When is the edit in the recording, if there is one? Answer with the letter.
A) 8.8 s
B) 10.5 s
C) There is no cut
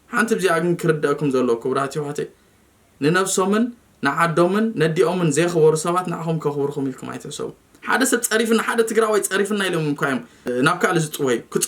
B